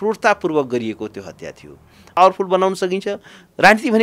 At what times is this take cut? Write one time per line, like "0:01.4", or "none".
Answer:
0:02.2